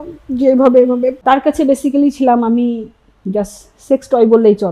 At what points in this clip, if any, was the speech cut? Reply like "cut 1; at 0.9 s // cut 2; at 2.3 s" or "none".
cut 1; at 1.2 s